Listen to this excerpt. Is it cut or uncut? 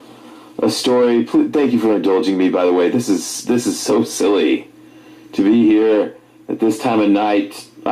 uncut